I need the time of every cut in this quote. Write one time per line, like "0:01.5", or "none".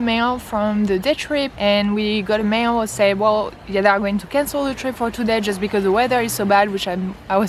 none